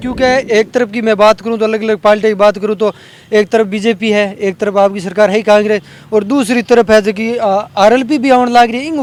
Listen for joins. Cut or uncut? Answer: uncut